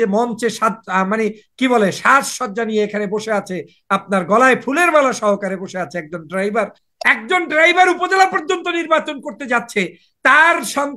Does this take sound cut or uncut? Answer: cut